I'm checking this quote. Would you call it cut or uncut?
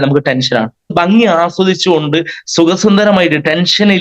cut